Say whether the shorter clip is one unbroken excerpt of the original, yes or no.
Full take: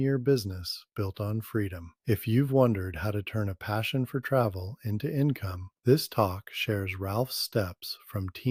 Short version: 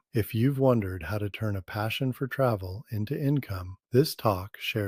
yes